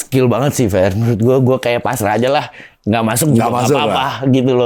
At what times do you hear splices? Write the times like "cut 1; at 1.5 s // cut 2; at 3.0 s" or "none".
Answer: none